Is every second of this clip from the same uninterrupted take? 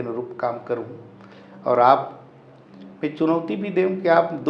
yes; 0 cuts

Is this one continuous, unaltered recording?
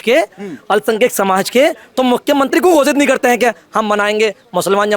yes; 0 cuts

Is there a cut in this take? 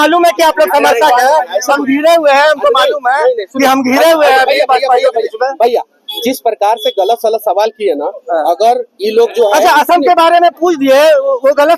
no; 0 cuts

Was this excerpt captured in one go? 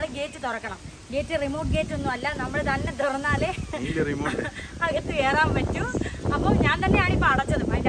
yes; 0 cuts

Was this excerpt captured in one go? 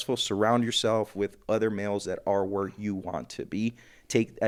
yes; 0 cuts

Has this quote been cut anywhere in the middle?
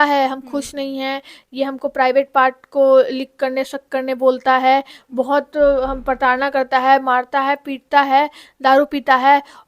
no; 0 cuts

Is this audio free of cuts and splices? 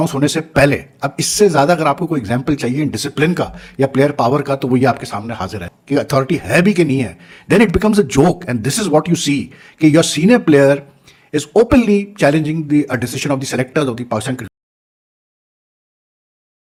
yes; 0 cuts

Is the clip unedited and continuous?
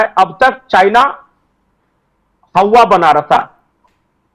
yes; 0 cuts

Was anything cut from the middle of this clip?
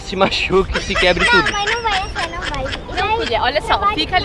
no; 0 cuts

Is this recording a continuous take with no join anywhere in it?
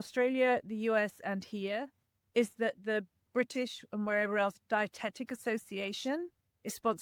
yes; 0 cuts

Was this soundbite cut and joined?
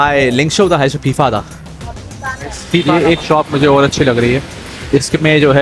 yes; 1 cut; at 2.8 s

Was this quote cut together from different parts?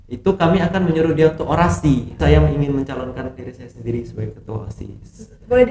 yes; 1 cut; at 2.2 s

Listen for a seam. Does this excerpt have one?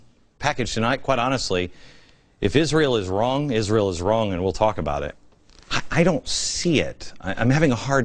yes; 1 cut; at 1.2 s

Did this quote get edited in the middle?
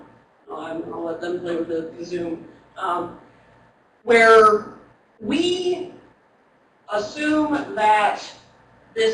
yes; 1 cut; at 2.3 s

